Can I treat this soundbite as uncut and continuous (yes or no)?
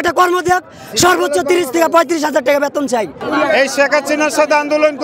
no